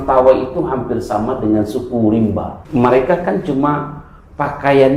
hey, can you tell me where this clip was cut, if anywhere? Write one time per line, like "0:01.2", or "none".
0:02.6

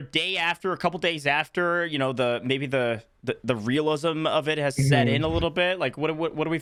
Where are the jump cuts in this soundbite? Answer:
none

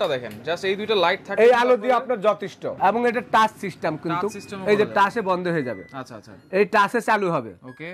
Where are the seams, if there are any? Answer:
0:02.6

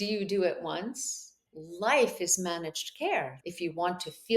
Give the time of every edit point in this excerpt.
0:01.5
0:03.3

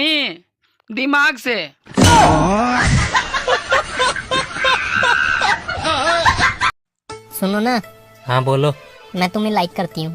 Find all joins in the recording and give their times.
0:06.8

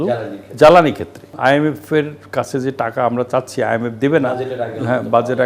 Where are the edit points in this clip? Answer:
0:01.3

